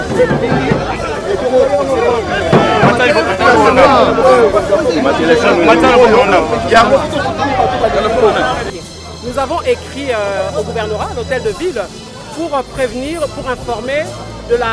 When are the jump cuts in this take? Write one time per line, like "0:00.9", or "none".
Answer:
0:08.7